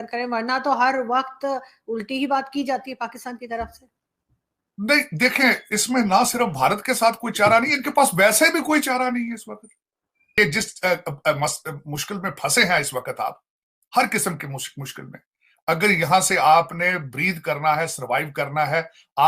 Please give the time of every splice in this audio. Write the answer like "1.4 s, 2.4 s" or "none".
10.4 s